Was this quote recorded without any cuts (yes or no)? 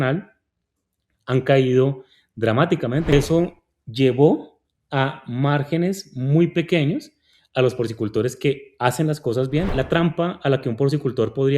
no